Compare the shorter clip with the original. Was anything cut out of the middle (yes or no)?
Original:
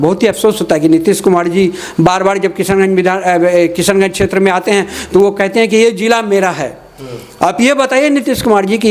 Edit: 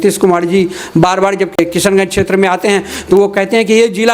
yes